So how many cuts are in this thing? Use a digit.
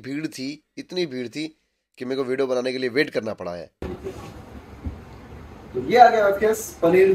1